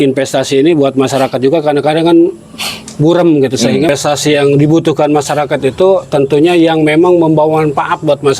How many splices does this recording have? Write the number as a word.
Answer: one